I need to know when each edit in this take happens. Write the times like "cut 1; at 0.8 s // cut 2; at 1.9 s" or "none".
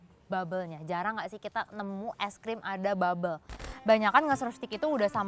cut 1; at 3.7 s